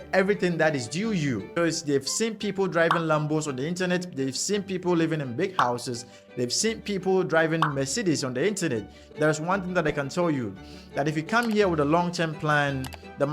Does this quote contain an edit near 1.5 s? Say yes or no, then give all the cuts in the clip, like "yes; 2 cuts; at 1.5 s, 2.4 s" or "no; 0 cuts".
yes; 2 cuts; at 1.5 s, 9.0 s